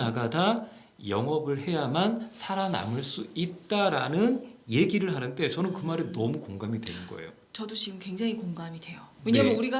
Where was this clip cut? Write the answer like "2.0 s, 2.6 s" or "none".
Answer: none

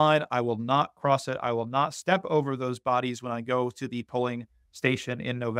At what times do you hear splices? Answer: none

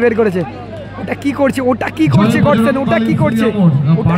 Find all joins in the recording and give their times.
none

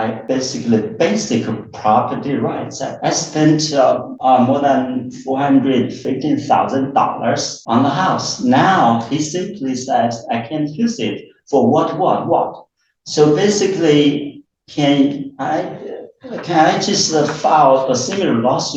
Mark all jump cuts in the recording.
none

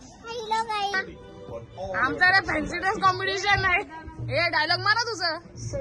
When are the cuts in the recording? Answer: 0.9 s

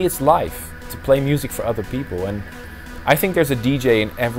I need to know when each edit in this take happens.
none

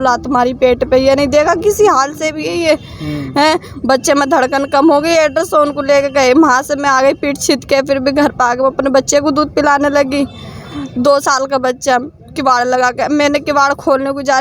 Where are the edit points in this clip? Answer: none

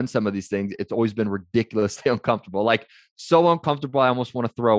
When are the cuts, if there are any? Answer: none

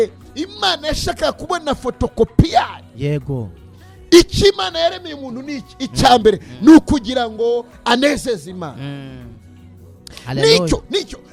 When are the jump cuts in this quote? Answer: none

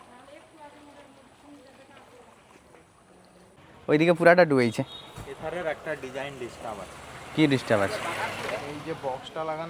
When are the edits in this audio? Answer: none

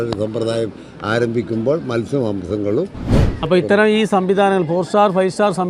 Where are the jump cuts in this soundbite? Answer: 3.1 s

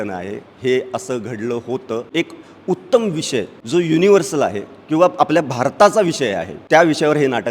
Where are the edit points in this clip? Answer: 2.1 s, 3.6 s, 6.5 s

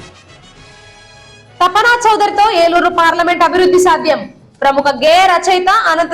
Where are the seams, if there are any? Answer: 1.0 s

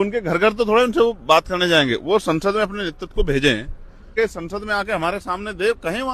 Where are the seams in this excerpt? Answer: 4.1 s

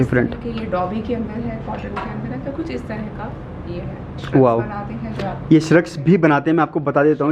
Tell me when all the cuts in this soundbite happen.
4.2 s

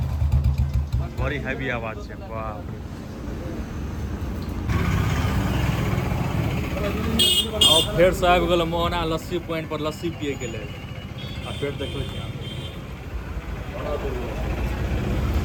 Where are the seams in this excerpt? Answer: none

